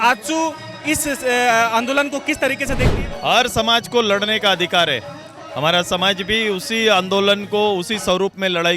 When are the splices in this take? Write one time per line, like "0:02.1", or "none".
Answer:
0:02.9

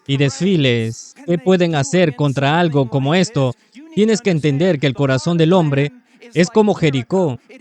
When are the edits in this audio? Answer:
0:01.1

